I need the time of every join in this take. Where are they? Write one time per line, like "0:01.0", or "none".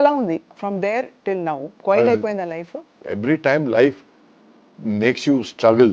0:01.7
0:02.8